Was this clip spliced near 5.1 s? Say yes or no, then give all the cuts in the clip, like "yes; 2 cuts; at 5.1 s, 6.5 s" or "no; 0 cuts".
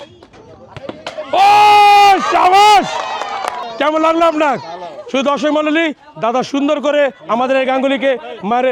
no; 1 cut; at 3.7 s